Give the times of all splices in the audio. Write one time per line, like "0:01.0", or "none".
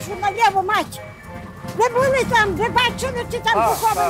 none